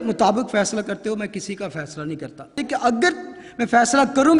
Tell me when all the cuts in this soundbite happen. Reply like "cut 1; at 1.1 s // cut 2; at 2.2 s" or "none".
cut 1; at 2.6 s